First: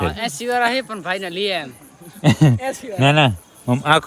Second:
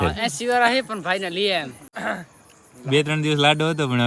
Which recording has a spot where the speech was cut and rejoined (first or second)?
second